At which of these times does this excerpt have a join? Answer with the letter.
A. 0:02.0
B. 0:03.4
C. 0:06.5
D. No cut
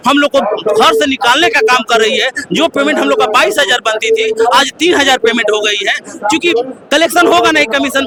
D